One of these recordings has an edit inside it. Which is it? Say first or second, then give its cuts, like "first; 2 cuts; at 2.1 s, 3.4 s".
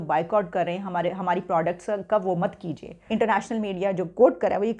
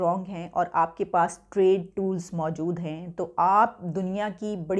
first; 1 cut; at 2.9 s